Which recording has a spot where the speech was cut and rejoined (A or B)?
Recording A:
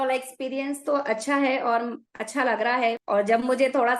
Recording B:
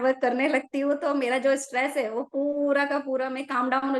A